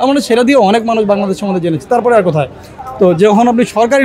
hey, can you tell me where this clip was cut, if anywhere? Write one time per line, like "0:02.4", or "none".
none